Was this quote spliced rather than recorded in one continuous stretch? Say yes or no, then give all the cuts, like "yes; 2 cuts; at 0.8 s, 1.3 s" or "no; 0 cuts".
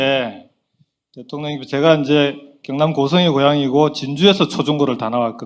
no; 0 cuts